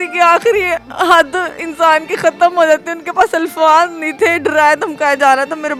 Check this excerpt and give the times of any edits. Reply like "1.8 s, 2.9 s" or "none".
none